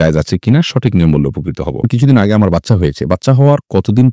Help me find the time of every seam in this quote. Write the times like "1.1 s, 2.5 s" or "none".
1.9 s